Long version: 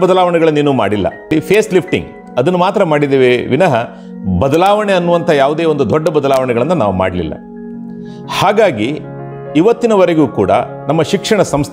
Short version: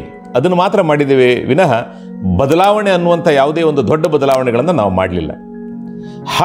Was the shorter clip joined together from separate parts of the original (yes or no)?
no